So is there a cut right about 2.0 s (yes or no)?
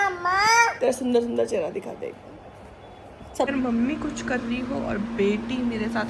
no